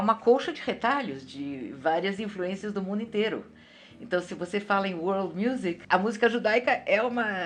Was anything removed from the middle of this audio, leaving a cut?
no; 0 cuts

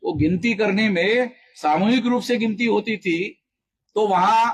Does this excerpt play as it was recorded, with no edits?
yes; 0 cuts

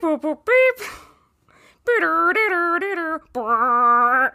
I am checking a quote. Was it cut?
no; 0 cuts

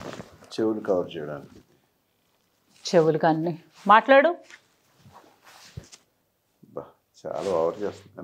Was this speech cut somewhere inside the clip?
no; 0 cuts

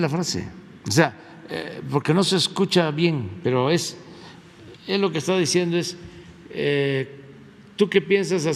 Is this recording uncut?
yes; 0 cuts

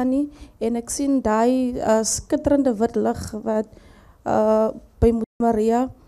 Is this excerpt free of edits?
yes; 0 cuts

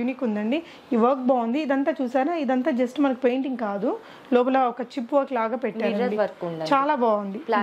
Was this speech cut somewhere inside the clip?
no; 0 cuts

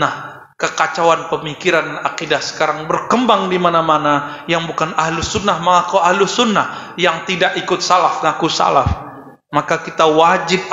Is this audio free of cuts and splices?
yes; 0 cuts

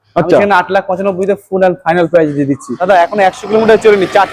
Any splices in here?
yes; 1 cut; at 2.7 s

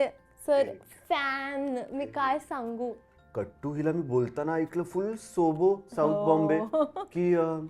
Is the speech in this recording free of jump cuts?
no; 1 cut; at 3.0 s

